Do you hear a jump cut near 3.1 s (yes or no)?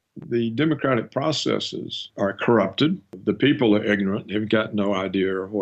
no